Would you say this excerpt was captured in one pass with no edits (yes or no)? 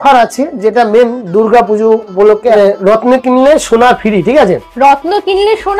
yes